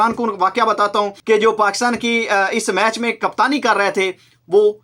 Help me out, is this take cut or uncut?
cut